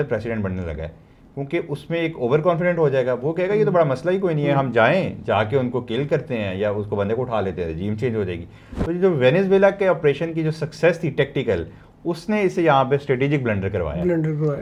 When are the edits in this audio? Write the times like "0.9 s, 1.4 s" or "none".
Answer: none